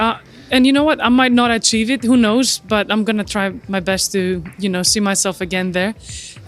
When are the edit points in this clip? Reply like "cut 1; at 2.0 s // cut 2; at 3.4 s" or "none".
none